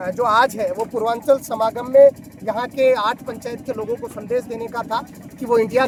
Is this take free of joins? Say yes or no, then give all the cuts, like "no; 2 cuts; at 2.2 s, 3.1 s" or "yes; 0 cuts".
yes; 0 cuts